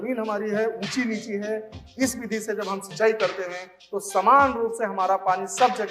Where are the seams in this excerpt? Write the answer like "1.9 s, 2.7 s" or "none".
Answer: 1.8 s

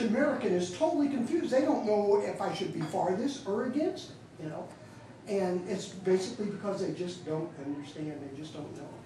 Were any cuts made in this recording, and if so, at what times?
none

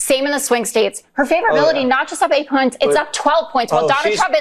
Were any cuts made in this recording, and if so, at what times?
1.0 s

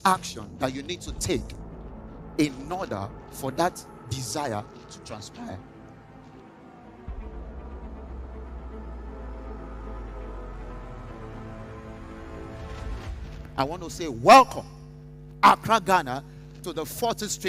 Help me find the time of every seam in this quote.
none

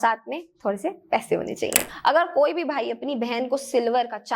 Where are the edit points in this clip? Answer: 1.8 s

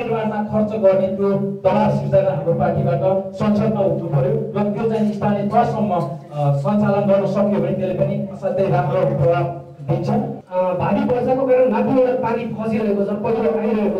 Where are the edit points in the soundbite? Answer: 10.3 s

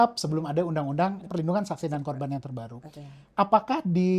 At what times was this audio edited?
none

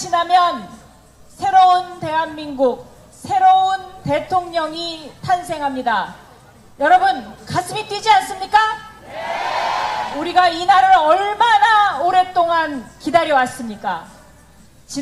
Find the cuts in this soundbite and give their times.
12.7 s

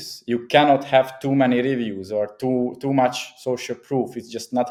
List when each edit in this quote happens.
none

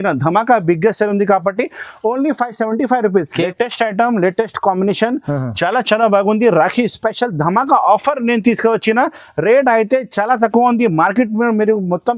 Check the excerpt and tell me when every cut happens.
3.5 s

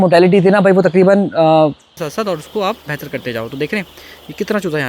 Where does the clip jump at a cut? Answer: 1.9 s

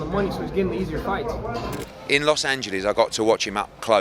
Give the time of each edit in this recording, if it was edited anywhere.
1.8 s

